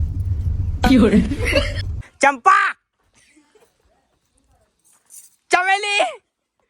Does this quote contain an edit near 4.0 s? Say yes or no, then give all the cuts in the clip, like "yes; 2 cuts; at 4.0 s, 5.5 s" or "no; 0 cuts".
no; 1 cut; at 1.7 s